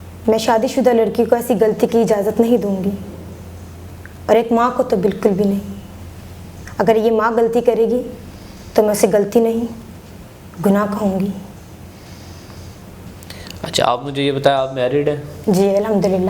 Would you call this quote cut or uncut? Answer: uncut